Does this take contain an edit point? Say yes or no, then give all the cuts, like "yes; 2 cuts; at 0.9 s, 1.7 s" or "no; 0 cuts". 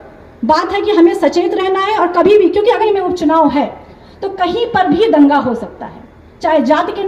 yes; 1 cut; at 2.8 s